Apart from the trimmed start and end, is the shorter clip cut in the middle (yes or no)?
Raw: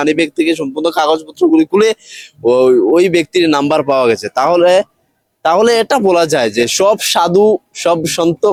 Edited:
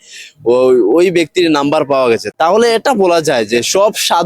yes